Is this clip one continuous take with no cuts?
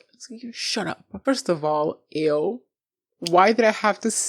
no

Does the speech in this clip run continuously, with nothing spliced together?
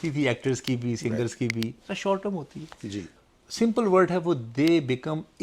no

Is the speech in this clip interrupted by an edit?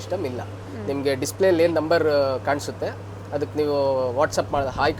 no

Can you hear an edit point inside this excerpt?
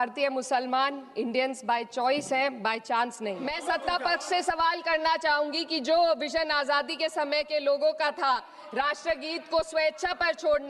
yes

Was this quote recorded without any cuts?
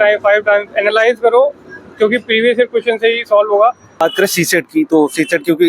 no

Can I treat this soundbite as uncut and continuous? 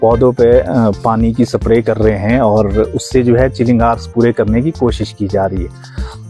yes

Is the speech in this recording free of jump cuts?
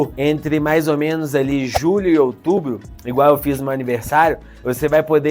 yes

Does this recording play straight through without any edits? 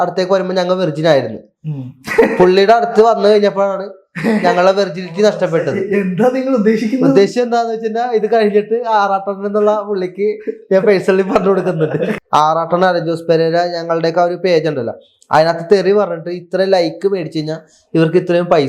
no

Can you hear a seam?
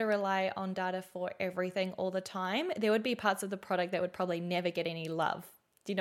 no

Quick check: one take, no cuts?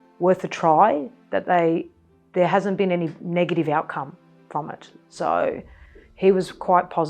yes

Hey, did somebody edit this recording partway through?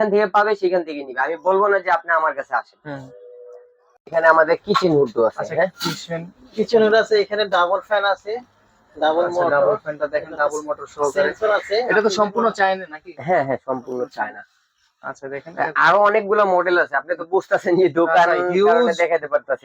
no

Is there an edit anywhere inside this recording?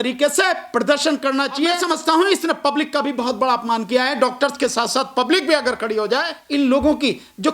yes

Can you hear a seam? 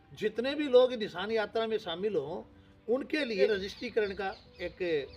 yes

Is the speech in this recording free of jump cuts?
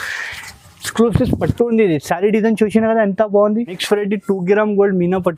no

